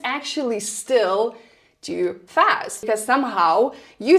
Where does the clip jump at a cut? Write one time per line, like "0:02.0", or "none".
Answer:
0:02.9